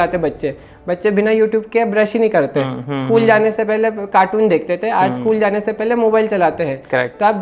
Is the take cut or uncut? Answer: uncut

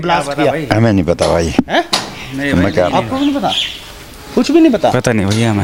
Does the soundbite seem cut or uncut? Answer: uncut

